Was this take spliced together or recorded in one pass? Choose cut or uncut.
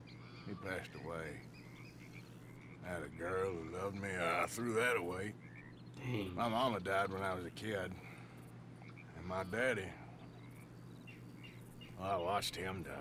uncut